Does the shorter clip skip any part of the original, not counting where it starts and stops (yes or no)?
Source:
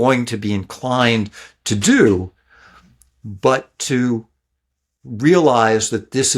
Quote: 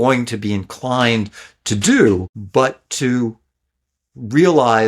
yes